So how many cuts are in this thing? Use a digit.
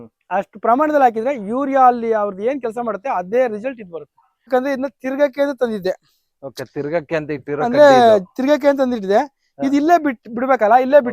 1